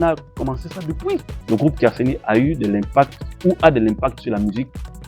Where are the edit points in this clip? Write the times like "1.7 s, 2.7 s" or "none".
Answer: 1.3 s